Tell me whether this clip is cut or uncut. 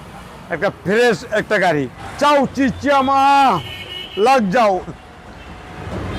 cut